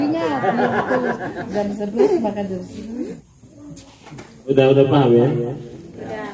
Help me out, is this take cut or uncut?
cut